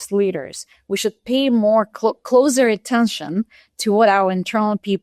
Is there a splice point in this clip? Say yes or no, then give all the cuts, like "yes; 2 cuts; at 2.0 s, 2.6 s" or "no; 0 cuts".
no; 0 cuts